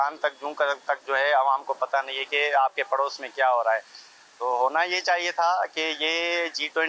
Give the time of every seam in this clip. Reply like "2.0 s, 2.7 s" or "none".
none